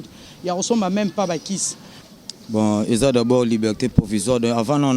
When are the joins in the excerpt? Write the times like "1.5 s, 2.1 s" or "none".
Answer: 2.0 s